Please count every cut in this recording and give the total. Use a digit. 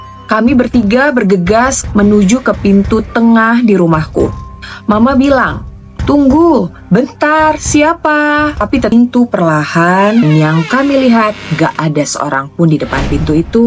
1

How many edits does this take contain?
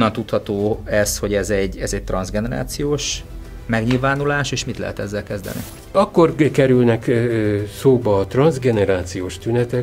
1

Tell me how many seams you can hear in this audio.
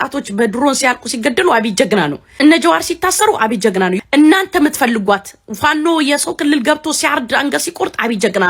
2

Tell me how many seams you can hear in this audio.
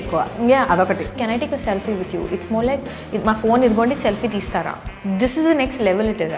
1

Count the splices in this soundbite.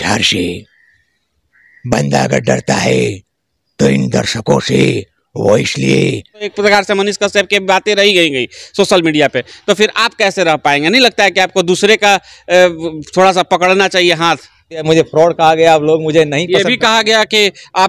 2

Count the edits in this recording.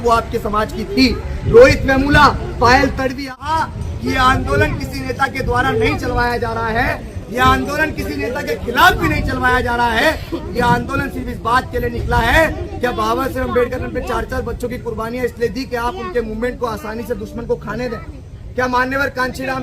1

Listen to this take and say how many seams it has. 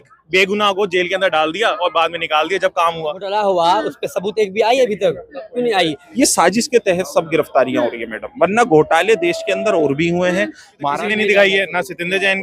3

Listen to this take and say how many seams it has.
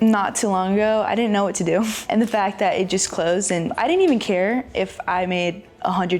3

